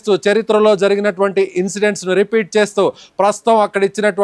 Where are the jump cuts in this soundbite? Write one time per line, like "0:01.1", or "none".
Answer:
0:03.3

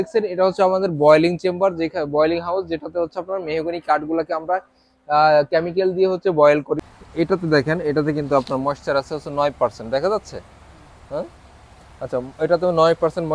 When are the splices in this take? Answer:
0:07.0

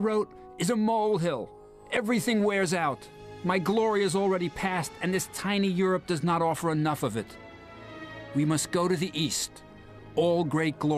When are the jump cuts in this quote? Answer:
0:01.4

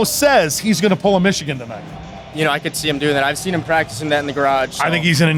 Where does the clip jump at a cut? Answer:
none

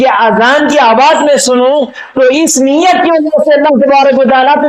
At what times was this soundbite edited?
none

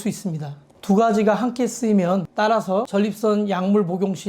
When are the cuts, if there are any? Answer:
0:02.3

